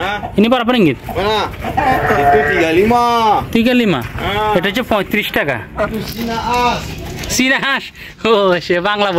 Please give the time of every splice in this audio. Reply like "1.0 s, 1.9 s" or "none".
none

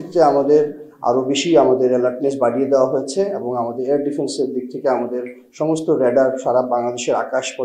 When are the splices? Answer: none

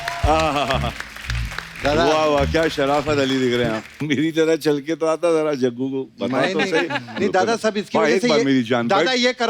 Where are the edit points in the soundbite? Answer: 4.0 s

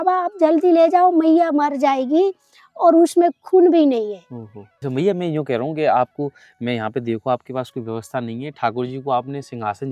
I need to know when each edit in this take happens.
4.8 s

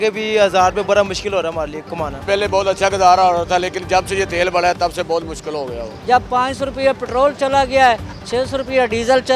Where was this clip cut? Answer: 2.2 s, 5.9 s

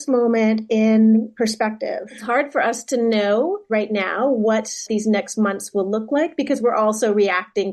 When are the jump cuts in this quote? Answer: 2.1 s

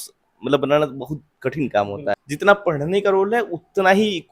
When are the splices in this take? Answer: 2.2 s

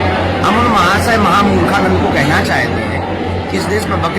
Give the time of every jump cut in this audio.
1.1 s

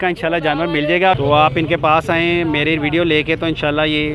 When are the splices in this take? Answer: 1.2 s

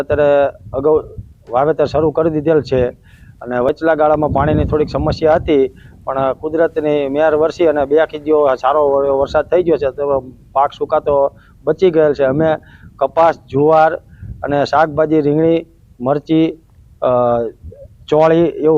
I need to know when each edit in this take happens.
7.7 s

